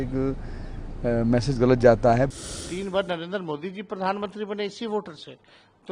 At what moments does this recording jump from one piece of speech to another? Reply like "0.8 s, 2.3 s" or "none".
2.3 s